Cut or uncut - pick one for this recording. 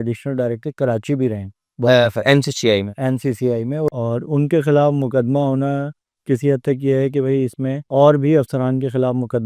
cut